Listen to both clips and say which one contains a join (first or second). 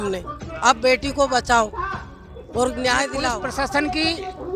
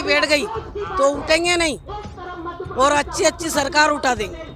first